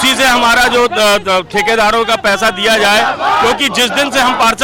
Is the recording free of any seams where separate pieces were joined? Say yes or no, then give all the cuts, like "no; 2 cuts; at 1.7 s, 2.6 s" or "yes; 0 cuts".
yes; 0 cuts